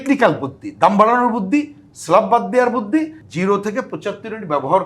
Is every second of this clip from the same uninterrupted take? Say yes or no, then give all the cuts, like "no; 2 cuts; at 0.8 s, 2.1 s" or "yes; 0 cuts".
no; 1 cut; at 3.2 s